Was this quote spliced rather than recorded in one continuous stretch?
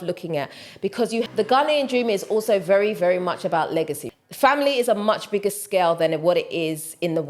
yes; 2 cuts; at 1.3 s, 4.0 s

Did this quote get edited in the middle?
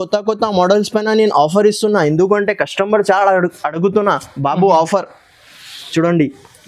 no; 0 cuts

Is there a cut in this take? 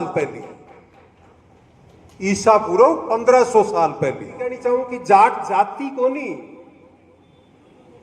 yes; 1 cut; at 4.6 s

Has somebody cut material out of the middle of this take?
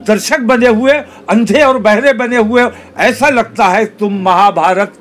no; 0 cuts

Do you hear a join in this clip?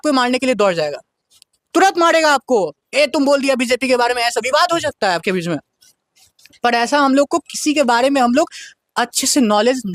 no; 0 cuts

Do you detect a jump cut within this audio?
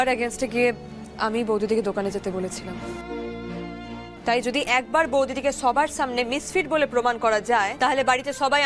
yes; 2 cuts; at 4.2 s, 7.7 s

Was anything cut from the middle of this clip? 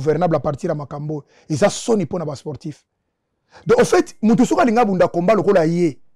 no; 0 cuts

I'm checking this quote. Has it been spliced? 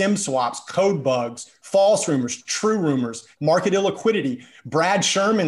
yes; 2 cuts; at 1.7 s, 3.3 s

